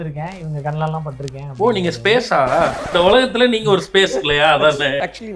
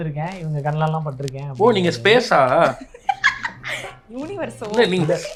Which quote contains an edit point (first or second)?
first